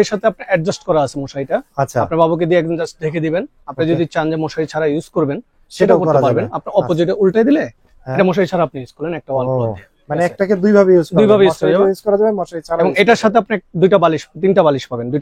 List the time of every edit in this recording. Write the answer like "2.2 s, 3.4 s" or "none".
none